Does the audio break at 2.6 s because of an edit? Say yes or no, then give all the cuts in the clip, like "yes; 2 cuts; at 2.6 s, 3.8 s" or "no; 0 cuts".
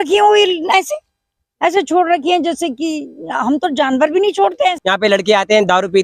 no; 1 cut; at 4.8 s